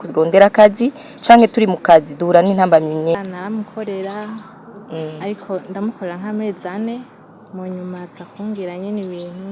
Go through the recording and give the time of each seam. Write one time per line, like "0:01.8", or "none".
0:03.1

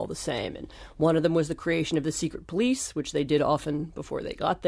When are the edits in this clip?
0:01.0

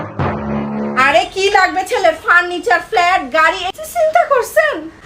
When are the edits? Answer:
0:01.0

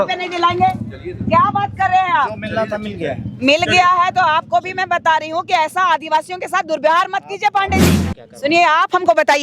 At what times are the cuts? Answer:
0:08.0

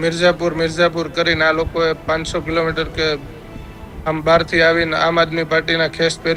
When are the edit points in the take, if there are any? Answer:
none

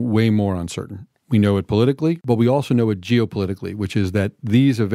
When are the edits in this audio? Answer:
0:02.2

